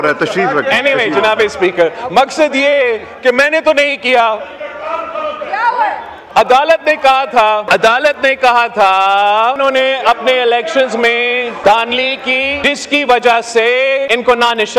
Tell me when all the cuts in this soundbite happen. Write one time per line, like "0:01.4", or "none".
0:07.6
0:09.6
0:11.6
0:12.6
0:14.1